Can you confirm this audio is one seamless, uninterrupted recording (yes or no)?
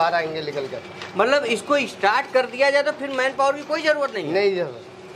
yes